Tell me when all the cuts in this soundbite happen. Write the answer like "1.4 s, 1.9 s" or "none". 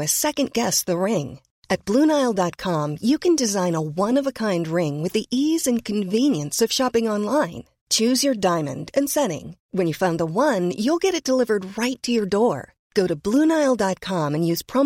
none